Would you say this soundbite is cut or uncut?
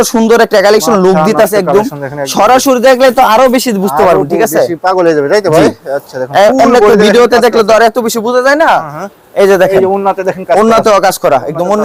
uncut